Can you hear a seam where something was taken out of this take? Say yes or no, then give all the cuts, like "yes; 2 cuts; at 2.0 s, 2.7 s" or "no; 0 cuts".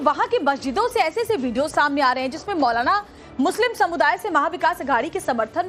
no; 0 cuts